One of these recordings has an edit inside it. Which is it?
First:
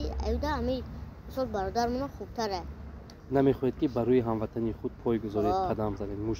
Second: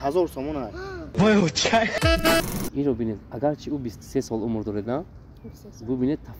second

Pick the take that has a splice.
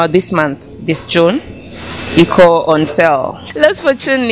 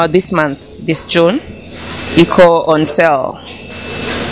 first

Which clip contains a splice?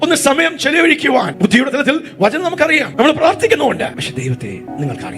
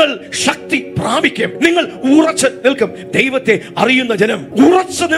first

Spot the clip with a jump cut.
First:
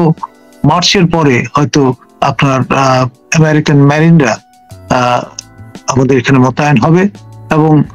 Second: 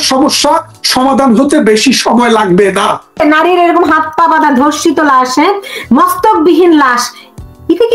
second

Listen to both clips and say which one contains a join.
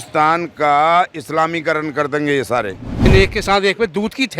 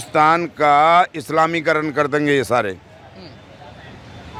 first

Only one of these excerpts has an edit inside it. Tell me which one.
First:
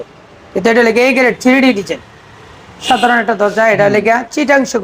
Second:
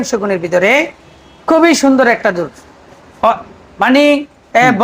first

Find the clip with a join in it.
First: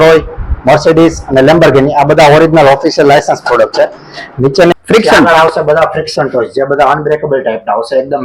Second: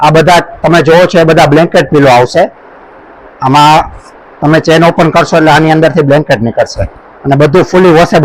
first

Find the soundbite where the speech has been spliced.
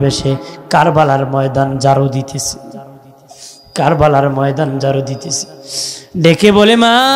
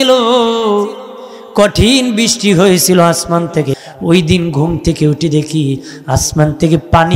second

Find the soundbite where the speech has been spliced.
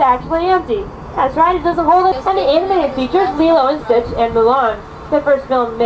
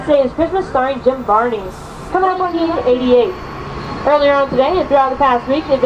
second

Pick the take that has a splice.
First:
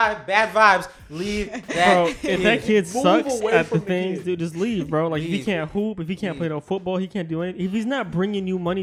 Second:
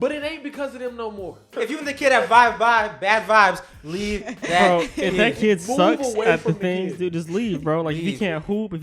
second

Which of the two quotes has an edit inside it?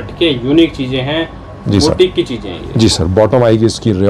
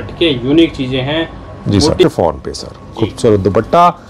second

